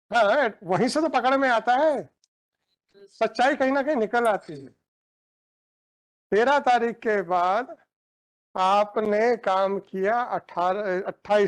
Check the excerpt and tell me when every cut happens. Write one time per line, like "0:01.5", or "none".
none